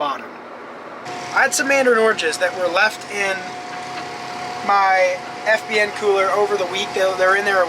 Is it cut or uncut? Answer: cut